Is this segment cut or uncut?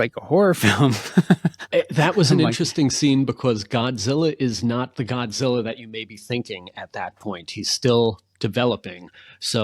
uncut